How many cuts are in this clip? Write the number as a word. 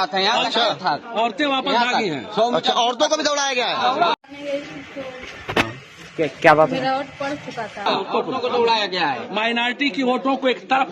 two